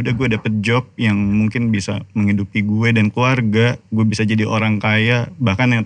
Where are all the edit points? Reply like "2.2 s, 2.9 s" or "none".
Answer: 3.8 s